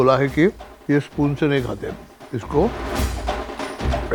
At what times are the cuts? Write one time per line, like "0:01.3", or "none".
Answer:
none